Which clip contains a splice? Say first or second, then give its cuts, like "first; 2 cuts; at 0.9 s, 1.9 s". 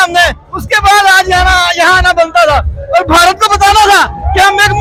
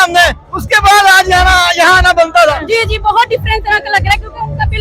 second; 1 cut; at 2.6 s